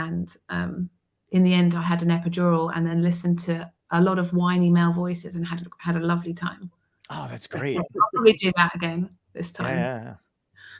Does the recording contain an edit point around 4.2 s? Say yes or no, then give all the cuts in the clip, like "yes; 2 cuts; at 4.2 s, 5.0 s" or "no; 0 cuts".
no; 0 cuts